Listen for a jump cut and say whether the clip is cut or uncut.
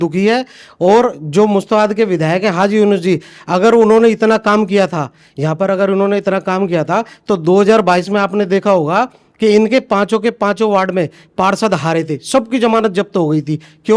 uncut